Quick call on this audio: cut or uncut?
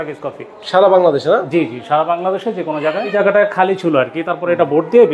cut